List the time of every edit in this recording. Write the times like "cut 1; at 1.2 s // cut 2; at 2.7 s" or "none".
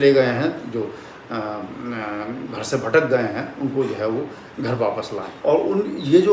cut 1; at 5.2 s